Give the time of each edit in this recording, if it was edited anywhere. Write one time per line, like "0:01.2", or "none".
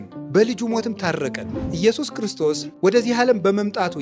0:01.6
0:02.7